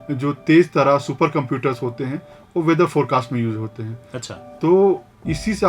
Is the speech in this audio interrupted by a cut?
no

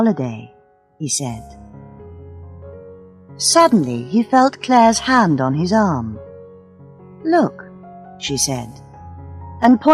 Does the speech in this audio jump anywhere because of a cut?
yes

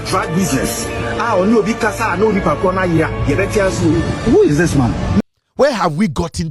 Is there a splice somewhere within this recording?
yes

